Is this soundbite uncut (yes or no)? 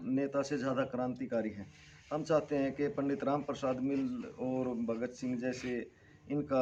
yes